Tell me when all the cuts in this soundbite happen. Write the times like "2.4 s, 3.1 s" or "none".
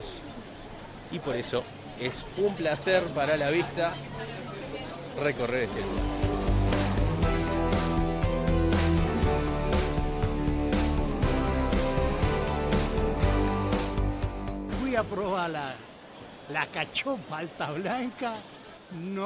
14.7 s